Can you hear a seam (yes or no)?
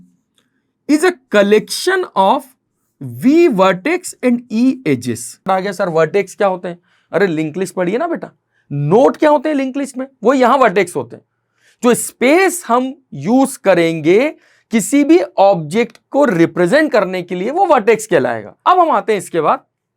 yes